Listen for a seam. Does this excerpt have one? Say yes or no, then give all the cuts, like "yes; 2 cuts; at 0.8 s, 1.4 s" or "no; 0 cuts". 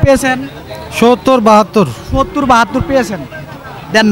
no; 0 cuts